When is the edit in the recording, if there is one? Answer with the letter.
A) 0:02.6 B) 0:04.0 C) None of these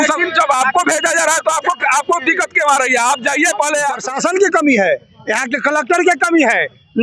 B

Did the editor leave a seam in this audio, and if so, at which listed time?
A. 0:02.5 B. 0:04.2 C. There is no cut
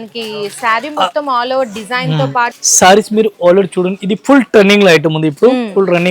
A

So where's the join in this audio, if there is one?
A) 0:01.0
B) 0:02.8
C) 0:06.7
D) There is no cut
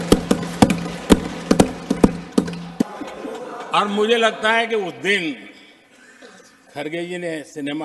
B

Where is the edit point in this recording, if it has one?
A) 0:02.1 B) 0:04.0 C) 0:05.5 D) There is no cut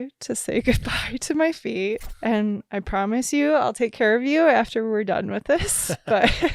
A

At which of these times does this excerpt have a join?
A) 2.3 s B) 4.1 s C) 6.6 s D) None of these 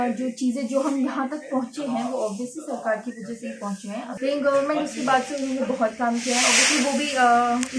B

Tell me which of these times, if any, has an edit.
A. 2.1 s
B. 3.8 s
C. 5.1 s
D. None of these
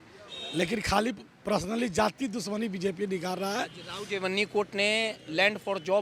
D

